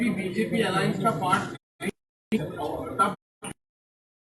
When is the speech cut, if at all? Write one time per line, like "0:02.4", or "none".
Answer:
0:01.6